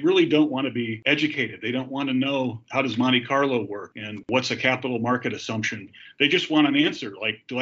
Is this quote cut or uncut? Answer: cut